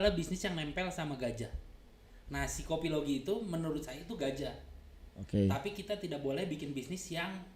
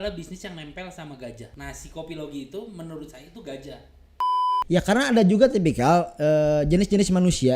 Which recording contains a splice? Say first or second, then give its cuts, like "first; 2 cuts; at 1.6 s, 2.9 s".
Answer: second; 2 cuts; at 1.5 s, 4.4 s